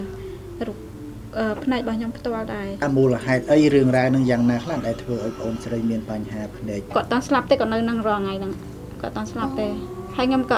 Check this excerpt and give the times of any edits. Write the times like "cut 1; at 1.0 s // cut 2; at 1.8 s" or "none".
cut 1; at 2.8 s // cut 2; at 6.8 s